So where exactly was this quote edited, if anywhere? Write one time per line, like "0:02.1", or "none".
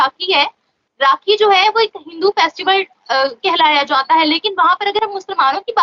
none